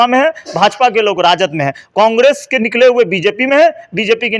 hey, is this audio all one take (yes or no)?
yes